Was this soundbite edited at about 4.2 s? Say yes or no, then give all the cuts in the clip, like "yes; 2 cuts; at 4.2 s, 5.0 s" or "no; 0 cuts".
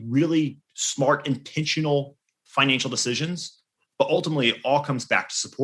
yes; 1 cut; at 4.2 s